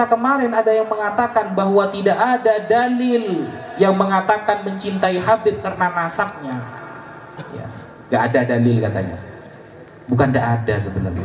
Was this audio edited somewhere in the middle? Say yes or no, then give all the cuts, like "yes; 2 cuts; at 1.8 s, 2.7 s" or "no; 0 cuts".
no; 0 cuts